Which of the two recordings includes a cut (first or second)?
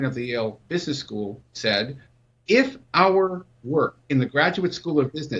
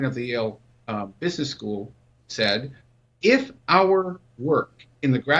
first